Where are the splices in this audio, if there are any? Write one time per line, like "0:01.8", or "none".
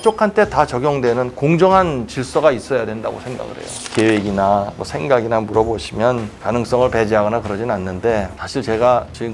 0:03.8